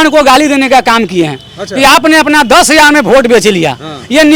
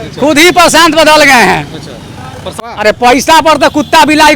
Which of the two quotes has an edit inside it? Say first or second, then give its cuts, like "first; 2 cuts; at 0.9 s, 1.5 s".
second; 1 cut; at 2.7 s